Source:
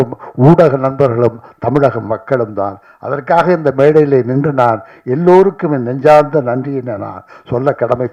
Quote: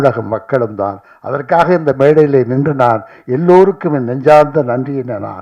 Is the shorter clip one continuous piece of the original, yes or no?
yes